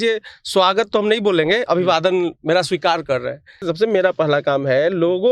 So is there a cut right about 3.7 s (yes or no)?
yes